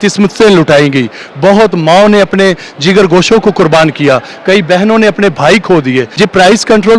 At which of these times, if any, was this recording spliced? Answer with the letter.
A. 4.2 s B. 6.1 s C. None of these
B